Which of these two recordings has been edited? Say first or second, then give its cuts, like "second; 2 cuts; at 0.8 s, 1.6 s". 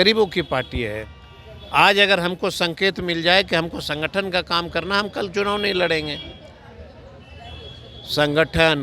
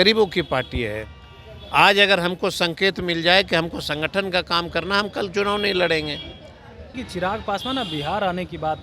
second; 1 cut; at 6.9 s